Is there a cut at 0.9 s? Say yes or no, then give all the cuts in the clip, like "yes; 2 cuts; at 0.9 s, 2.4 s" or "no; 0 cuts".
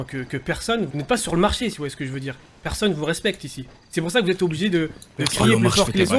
yes; 1 cut; at 0.9 s